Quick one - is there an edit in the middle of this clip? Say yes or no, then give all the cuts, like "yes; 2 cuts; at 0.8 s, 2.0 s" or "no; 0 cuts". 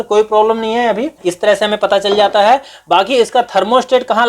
no; 0 cuts